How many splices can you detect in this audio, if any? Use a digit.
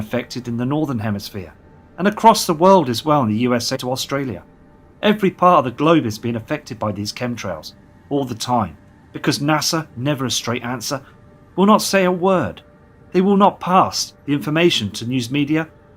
0